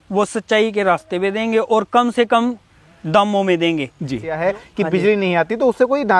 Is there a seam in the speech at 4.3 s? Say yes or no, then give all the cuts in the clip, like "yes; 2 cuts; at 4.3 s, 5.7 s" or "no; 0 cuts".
yes; 1 cut; at 4.3 s